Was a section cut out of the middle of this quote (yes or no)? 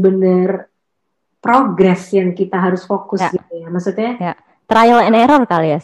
no